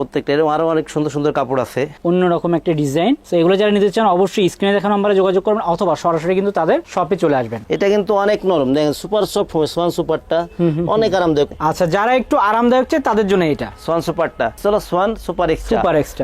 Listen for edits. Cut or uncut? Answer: cut